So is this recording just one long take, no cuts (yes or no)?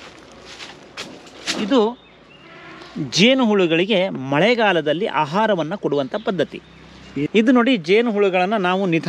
no